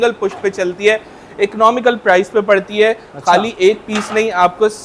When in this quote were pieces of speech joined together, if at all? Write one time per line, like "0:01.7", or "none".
none